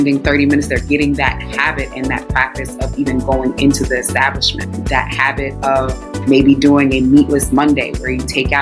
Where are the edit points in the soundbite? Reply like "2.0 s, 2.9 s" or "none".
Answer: 4.8 s, 6.0 s